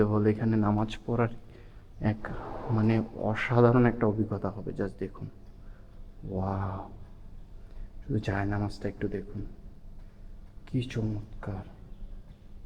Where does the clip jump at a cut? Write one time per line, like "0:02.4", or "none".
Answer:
none